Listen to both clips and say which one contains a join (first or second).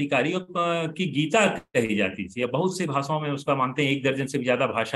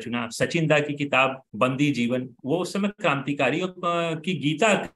second